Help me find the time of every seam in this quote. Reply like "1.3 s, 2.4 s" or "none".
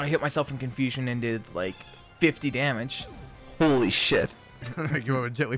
4.7 s